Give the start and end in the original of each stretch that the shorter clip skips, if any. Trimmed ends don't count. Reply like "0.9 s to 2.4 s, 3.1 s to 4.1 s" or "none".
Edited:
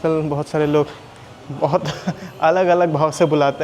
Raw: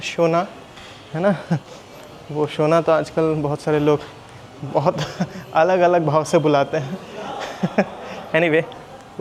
none